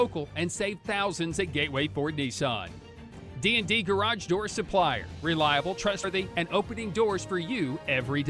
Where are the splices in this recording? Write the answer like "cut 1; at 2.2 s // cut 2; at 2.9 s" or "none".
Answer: cut 1; at 6.0 s